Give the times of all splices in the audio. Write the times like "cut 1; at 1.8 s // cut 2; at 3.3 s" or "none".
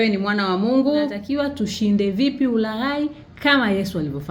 cut 1; at 1.1 s